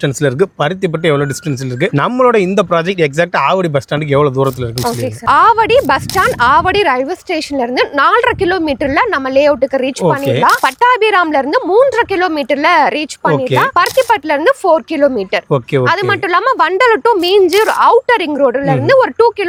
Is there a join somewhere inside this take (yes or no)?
no